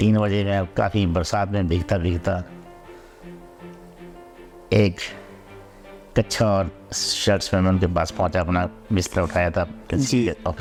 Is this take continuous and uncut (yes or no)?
yes